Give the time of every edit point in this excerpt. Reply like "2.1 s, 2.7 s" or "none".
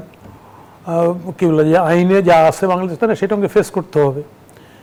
none